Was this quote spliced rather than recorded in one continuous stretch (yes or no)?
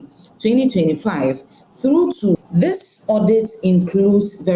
yes